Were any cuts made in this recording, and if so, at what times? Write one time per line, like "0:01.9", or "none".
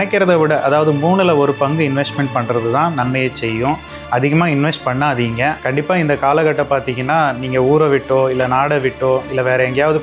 0:05.6